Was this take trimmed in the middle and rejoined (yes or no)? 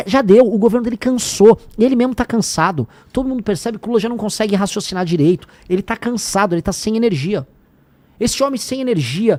no